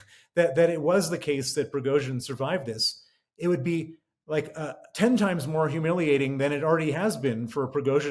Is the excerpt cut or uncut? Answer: uncut